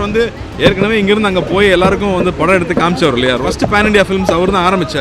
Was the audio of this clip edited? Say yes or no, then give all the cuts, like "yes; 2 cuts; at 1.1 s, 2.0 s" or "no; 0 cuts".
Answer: yes; 1 cut; at 3.4 s